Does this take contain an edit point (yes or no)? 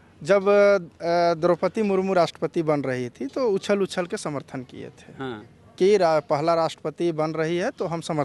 no